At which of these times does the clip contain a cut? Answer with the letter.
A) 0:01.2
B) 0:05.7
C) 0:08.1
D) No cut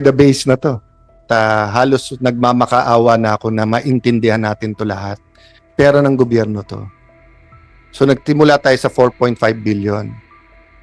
A